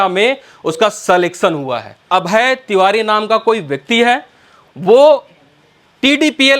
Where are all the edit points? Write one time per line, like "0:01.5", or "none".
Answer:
0:02.0